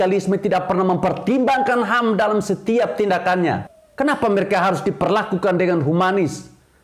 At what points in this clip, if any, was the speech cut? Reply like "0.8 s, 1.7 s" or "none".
3.8 s

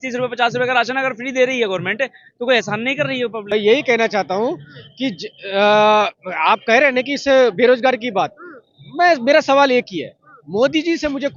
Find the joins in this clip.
none

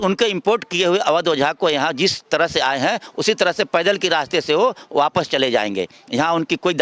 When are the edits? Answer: none

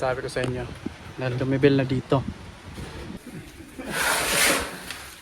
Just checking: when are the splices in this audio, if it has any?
3.2 s

